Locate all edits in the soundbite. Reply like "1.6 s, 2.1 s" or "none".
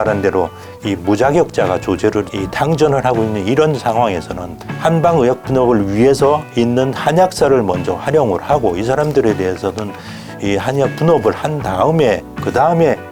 none